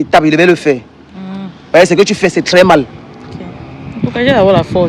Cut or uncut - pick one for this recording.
uncut